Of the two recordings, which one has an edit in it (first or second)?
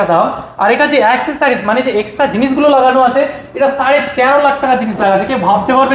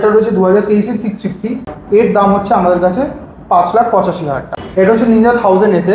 second